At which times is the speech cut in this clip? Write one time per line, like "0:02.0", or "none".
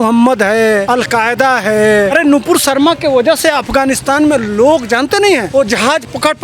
0:00.9
0:02.1
0:05.5

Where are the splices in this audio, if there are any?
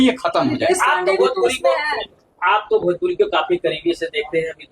none

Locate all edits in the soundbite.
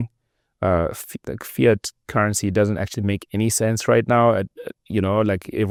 none

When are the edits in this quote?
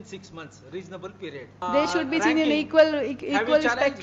0:01.6

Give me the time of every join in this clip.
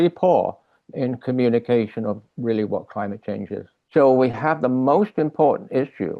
0:03.7

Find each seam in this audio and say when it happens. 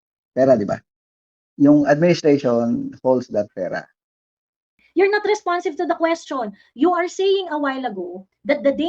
0:04.8

